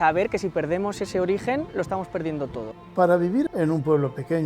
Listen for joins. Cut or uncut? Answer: cut